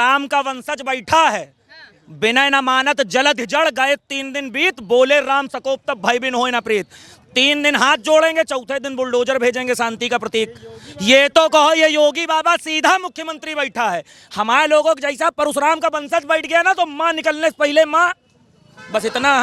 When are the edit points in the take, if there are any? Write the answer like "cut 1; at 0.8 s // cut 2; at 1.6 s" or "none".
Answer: none